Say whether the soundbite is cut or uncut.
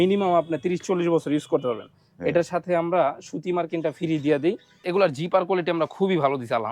cut